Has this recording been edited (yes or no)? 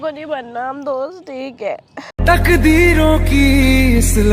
no